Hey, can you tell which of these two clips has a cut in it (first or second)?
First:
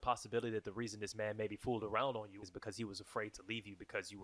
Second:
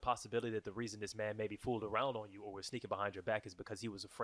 first